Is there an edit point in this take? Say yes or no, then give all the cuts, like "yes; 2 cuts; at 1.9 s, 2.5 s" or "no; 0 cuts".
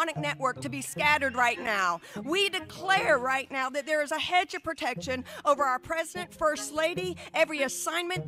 no; 0 cuts